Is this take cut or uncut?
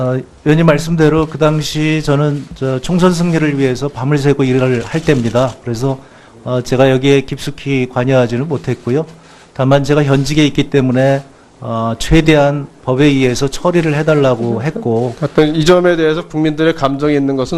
cut